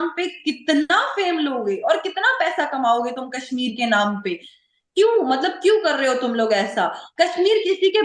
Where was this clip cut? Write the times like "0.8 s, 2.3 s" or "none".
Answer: none